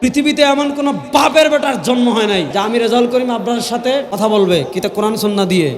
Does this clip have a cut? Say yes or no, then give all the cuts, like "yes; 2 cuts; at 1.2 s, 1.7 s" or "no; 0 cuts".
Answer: yes; 2 cuts; at 2.5 s, 4.1 s